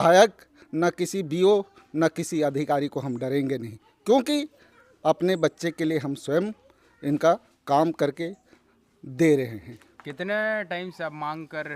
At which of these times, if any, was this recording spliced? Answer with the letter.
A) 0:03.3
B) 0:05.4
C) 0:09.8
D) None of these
D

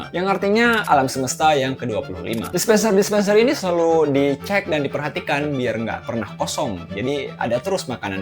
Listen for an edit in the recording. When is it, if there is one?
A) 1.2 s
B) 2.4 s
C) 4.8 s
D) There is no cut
B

